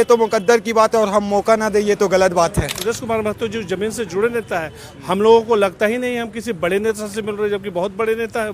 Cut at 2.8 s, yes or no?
yes